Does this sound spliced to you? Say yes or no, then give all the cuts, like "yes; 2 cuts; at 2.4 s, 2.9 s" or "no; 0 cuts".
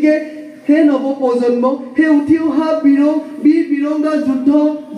no; 0 cuts